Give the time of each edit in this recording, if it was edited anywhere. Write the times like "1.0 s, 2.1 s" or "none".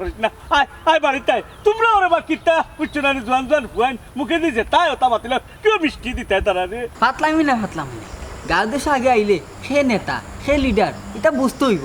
6.9 s